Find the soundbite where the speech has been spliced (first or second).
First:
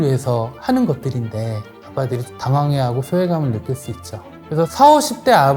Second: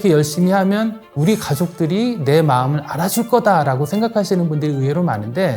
first